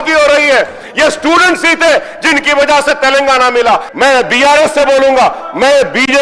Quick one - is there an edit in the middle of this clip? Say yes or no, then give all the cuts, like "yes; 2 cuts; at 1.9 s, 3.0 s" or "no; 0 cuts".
yes; 1 cut; at 3.9 s